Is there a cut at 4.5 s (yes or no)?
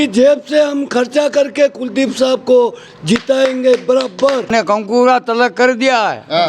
yes